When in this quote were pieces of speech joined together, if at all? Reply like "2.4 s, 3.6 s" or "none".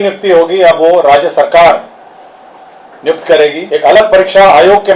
3.6 s